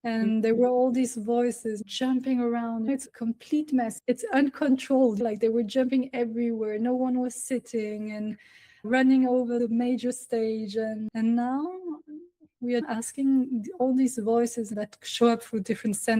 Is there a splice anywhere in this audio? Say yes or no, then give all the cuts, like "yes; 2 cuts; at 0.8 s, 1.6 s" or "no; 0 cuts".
yes; 3 cuts; at 1.8 s, 12.9 s, 14.8 s